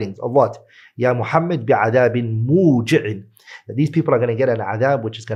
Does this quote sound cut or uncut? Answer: uncut